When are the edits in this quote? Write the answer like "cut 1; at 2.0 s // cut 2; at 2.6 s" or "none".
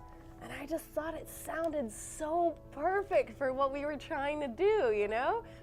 none